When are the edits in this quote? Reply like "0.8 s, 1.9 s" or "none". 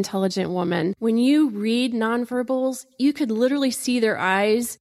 0.9 s